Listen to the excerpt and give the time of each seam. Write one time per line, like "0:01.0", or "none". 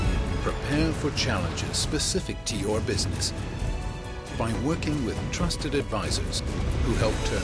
none